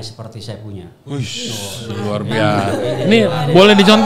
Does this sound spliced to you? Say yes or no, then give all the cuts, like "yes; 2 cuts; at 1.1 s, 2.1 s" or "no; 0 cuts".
no; 0 cuts